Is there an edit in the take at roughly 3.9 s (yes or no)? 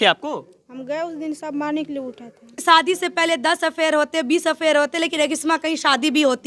no